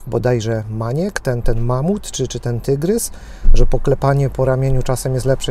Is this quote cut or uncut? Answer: uncut